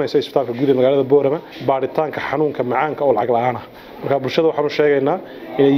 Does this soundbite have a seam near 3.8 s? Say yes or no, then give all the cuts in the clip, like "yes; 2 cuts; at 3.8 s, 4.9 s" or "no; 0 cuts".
no; 1 cut; at 1.5 s